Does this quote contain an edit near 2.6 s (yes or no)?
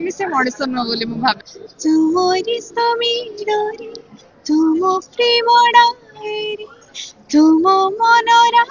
no